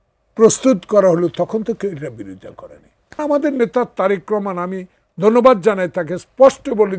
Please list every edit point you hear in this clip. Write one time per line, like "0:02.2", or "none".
0:03.2